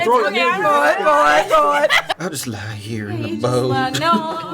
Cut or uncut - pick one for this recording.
cut